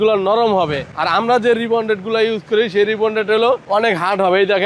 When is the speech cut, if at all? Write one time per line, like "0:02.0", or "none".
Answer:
none